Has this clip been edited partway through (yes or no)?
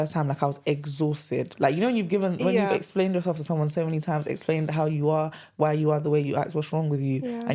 no